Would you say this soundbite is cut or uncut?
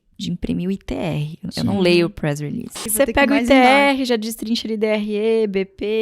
cut